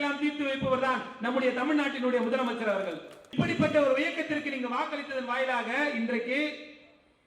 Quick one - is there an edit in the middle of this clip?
yes; 1 cut; at 3.3 s

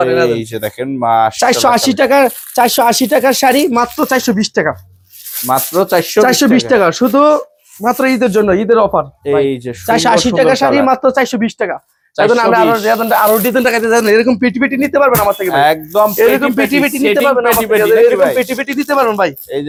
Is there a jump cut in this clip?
no; 0 cuts

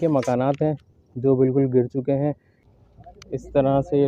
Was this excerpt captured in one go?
no; 1 cut; at 2.5 s

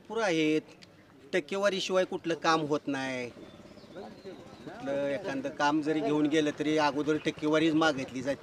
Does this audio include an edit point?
no; 0 cuts

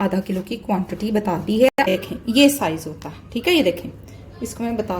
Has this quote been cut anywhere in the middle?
yes; 1 cut; at 1.9 s

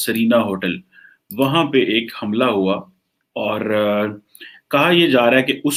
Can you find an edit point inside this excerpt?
no; 0 cuts

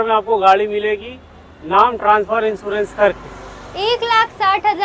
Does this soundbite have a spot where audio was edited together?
no; 0 cuts

